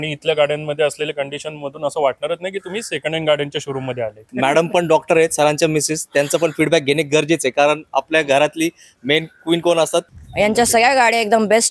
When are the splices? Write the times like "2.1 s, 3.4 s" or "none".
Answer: 4.2 s, 10.2 s